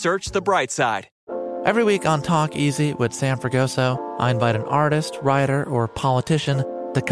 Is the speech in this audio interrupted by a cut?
yes; 1 cut; at 1.1 s

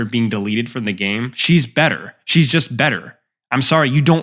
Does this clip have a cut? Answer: yes; 1 cut; at 1.3 s

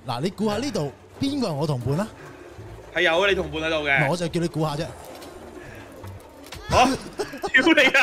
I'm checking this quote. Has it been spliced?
yes; 1 cut; at 4.3 s

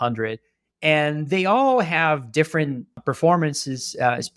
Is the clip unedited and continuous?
no; 1 cut; at 3.0 s

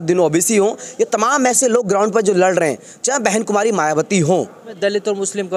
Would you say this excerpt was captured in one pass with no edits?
no; 1 cut; at 4.7 s

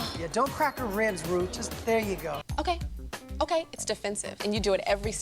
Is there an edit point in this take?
yes; 1 cut; at 2.4 s

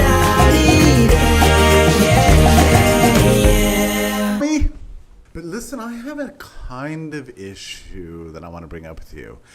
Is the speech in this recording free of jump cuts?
yes; 0 cuts

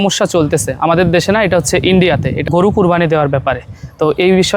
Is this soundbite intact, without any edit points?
no; 1 cut; at 2.4 s

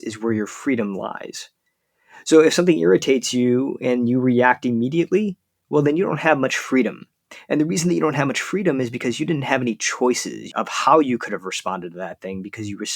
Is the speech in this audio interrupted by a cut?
yes; 1 cut; at 10.3 s

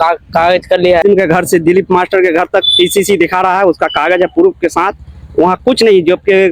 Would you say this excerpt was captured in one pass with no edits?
no; 1 cut; at 1.0 s

